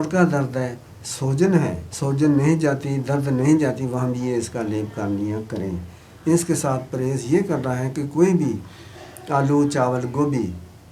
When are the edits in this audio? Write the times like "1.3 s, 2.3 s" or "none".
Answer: 1.9 s